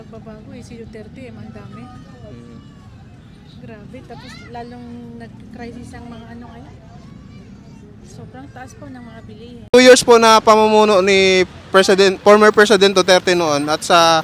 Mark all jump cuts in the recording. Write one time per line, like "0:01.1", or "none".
0:09.7

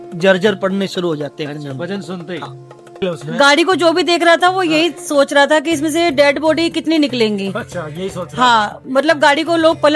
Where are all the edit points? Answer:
0:03.0

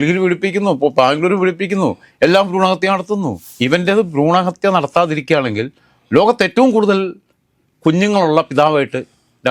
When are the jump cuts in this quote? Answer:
0:03.4

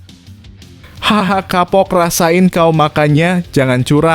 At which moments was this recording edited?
0:00.9

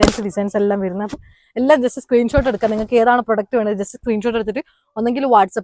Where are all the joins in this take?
none

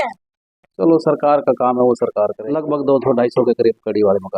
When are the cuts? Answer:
0:02.5

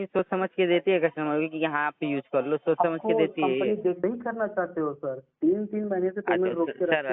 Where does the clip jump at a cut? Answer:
0:04.0

